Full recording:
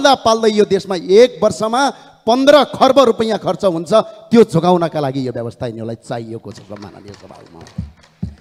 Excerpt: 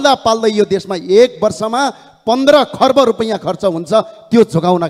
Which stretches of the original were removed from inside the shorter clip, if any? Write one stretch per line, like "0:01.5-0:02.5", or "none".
none

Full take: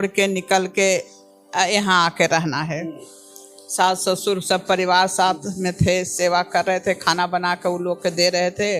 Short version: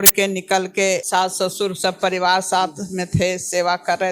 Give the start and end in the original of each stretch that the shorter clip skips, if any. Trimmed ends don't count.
0:01.0-0:03.7

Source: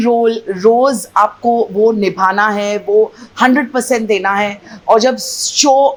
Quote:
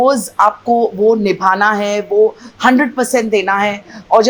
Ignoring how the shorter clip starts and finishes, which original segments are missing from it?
none

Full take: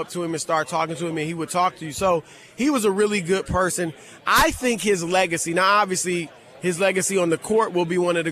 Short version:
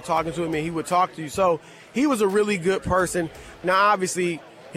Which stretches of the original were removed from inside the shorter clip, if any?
0:04.2-0:05.5

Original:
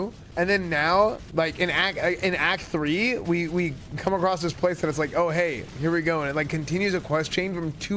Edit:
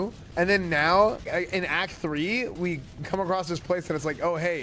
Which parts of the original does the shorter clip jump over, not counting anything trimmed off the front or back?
0:01.2-0:01.9
0:03.2-0:03.5

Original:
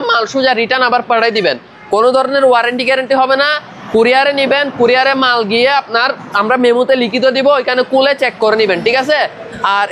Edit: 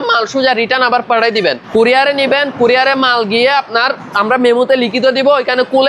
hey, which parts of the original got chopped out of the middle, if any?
0:01.6-0:03.8

